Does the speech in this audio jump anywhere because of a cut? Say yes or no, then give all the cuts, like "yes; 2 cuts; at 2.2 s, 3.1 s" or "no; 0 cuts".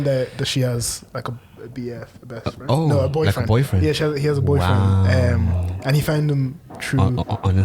no; 0 cuts